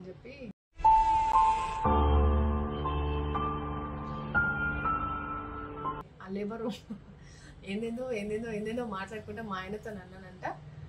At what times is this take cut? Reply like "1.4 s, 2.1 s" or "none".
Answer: none

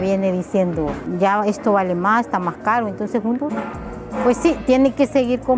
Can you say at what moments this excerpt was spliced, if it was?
1.0 s

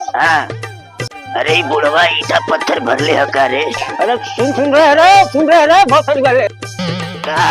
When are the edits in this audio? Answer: 1.1 s, 3.8 s

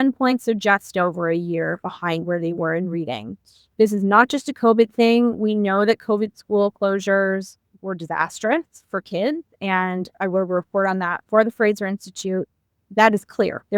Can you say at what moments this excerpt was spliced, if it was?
3.7 s, 10.2 s, 12.7 s

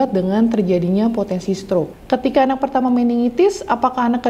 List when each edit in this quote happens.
2.0 s

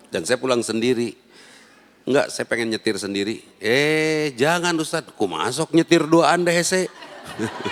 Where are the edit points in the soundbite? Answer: none

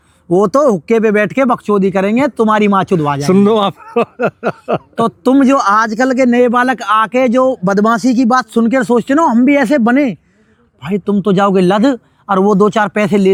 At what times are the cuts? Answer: none

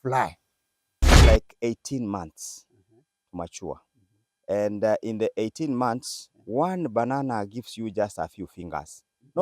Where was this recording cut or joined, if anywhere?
1.1 s

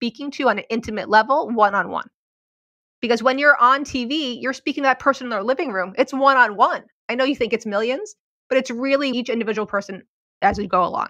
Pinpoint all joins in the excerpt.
9.1 s, 10.3 s

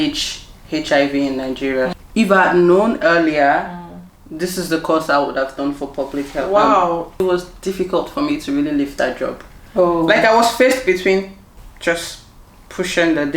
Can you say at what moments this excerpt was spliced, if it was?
1.9 s, 7.2 s

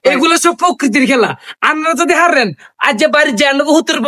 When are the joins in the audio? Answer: none

